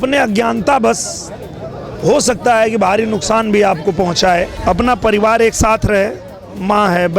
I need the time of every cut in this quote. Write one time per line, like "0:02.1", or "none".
0:04.6